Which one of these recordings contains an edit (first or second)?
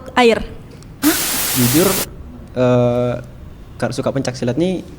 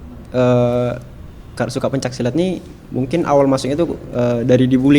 first